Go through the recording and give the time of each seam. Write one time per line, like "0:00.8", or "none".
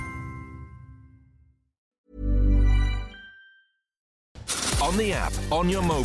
0:01.9
0:04.2